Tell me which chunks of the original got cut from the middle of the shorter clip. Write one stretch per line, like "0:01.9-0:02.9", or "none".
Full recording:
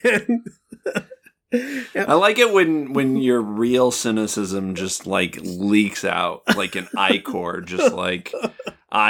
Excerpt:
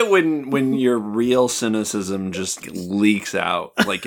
0:05.0-0:05.3